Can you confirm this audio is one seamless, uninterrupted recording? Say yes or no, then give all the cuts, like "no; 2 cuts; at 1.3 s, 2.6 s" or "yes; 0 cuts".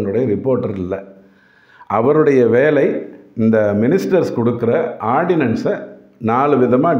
yes; 0 cuts